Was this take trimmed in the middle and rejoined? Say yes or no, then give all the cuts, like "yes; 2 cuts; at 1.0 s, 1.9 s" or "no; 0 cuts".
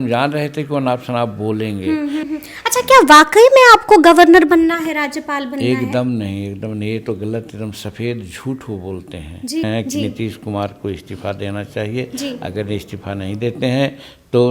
yes; 2 cuts; at 2.2 s, 9.6 s